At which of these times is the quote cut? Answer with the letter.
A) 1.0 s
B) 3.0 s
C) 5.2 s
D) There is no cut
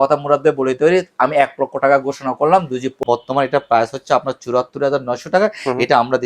B